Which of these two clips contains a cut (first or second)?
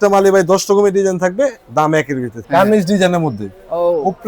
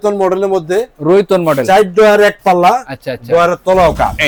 first